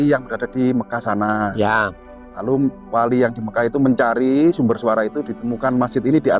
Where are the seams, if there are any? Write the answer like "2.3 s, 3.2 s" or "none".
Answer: none